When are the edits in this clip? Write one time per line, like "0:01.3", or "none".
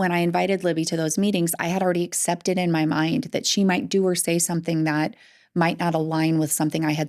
none